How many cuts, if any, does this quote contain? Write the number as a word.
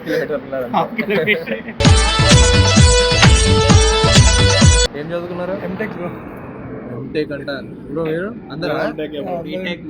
one